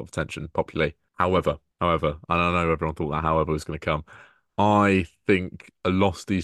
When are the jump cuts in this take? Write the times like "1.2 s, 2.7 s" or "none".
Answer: 1.0 s, 1.7 s